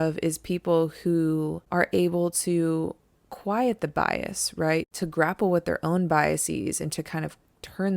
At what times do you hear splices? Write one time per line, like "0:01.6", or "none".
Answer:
0:01.6
0:04.9